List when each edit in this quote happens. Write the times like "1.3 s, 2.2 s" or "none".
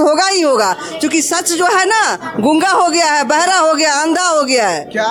none